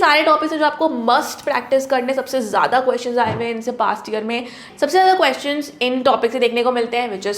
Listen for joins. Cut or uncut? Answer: cut